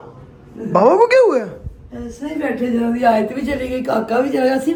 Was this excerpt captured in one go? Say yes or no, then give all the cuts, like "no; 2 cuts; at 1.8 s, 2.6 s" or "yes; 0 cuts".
yes; 0 cuts